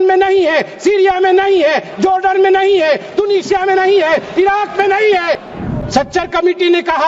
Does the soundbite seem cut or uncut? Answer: cut